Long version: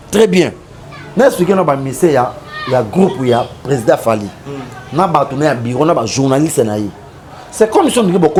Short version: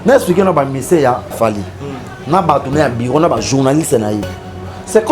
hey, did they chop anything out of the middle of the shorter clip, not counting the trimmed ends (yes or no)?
yes